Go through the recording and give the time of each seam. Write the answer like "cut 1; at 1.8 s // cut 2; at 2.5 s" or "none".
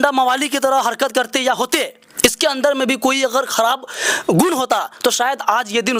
none

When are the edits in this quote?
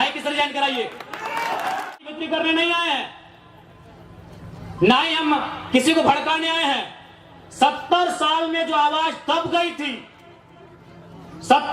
cut 1; at 1.9 s

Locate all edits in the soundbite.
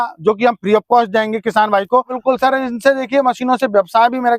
cut 1; at 2.1 s

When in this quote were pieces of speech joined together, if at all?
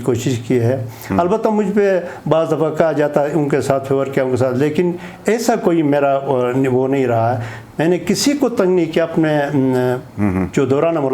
none

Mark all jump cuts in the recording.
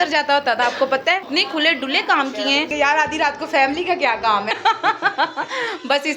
cut 1; at 1.3 s // cut 2; at 2.7 s // cut 3; at 4.5 s

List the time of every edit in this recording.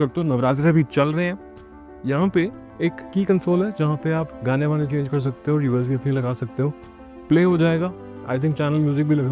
none

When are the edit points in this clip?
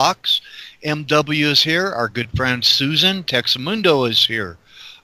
none

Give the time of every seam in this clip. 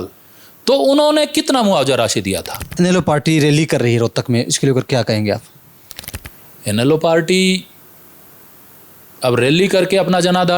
cut 1; at 2.6 s

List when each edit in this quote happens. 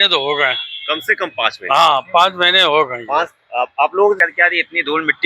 cut 1; at 4.2 s

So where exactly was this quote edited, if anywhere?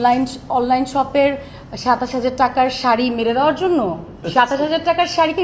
cut 1; at 4.1 s

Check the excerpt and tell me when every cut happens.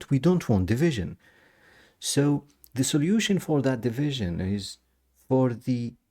none

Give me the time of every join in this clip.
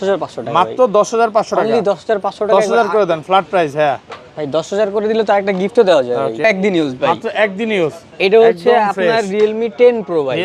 cut 1; at 6.4 s

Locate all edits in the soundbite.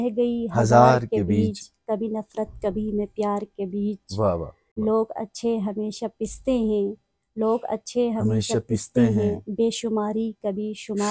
cut 1; at 4.7 s

